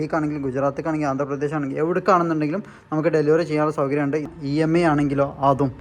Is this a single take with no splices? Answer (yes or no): no